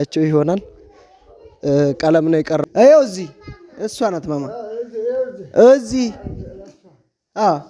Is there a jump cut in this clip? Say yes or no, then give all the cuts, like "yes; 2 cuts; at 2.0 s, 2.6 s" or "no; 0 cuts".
yes; 1 cut; at 2.6 s